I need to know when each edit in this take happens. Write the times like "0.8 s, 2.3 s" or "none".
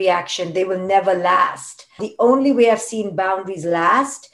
2.0 s